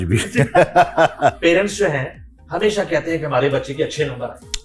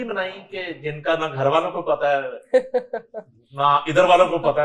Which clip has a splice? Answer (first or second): first